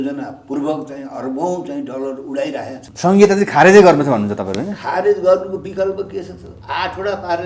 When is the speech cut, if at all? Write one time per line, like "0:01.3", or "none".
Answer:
0:02.8